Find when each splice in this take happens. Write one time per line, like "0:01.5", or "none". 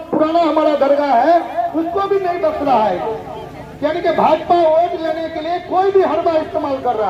none